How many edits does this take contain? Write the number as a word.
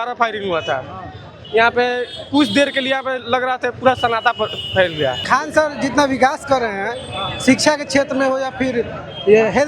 one